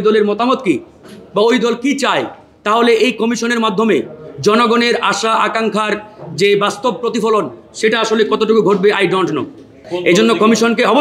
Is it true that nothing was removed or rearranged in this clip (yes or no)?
no